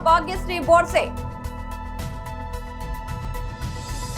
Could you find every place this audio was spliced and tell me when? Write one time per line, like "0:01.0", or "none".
0:03.3